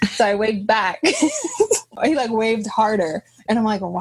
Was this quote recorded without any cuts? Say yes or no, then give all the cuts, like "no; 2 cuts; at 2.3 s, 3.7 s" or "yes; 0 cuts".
no; 1 cut; at 1.9 s